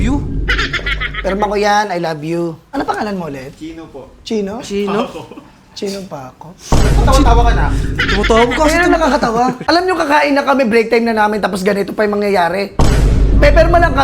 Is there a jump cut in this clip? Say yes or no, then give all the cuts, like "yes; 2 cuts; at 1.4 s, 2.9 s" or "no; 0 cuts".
yes; 2 cuts; at 2.6 s, 9.6 s